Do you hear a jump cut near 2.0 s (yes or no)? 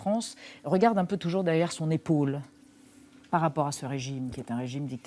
yes